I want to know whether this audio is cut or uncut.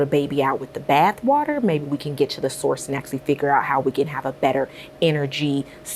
uncut